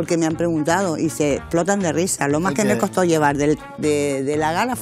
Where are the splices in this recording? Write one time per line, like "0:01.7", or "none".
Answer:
none